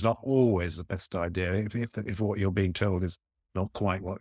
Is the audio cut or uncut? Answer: uncut